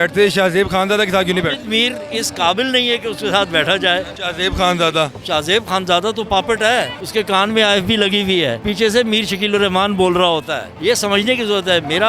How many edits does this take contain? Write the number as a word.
four